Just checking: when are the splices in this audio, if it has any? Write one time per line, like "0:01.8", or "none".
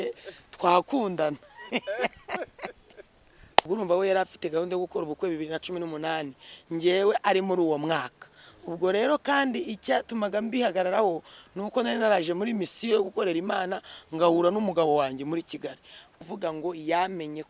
0:03.6
0:16.1